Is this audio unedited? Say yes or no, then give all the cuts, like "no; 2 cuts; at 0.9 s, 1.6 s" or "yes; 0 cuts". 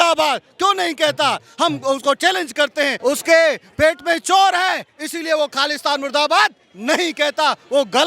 no; 1 cut; at 2.9 s